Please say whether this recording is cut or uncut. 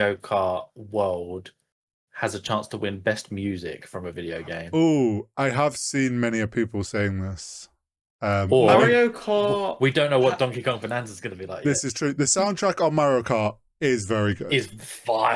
uncut